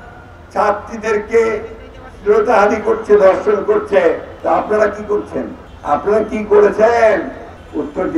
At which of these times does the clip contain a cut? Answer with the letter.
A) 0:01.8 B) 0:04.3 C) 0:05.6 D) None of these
B